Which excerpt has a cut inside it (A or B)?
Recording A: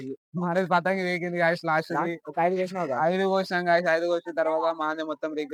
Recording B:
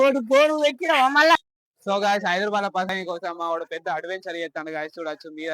B